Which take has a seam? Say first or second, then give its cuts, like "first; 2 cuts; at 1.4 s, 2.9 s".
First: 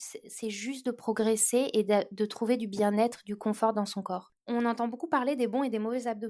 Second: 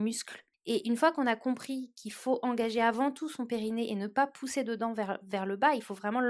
first; 1 cut; at 4.3 s